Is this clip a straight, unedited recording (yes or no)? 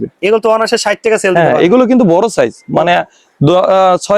yes